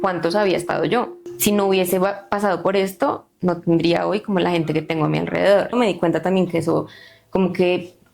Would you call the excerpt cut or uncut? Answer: cut